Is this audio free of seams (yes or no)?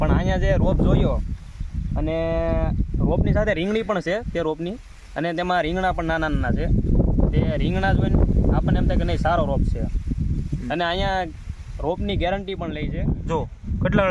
no